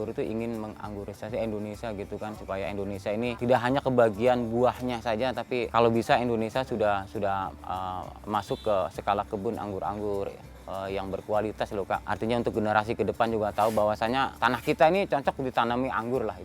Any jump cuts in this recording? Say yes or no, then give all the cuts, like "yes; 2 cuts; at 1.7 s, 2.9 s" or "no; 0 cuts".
yes; 4 cuts; at 3.4 s, 5.7 s, 12.1 s, 14.3 s